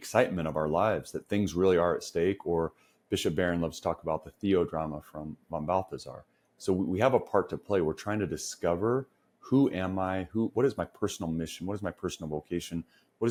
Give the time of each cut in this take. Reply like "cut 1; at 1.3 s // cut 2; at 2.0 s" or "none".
none